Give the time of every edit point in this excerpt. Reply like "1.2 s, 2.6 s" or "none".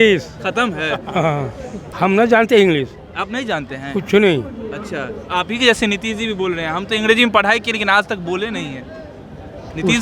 1.9 s